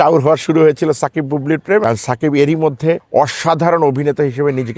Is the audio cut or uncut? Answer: cut